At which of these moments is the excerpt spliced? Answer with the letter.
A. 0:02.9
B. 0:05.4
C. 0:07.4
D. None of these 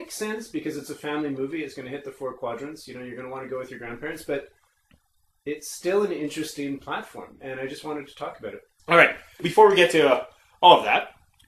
B